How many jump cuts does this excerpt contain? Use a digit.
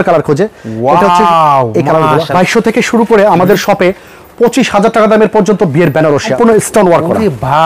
2